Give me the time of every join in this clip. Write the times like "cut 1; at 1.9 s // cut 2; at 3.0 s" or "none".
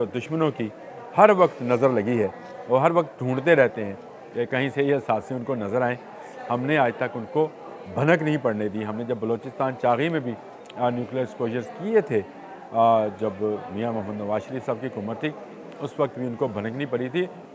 none